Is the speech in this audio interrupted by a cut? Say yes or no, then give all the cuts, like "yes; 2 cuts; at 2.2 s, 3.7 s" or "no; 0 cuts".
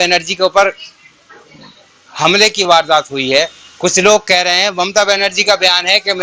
no; 0 cuts